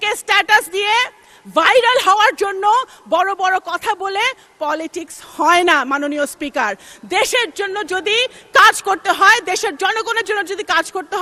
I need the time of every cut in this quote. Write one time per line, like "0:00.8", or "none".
none